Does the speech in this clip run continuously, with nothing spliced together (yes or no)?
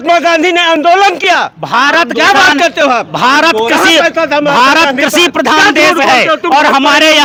yes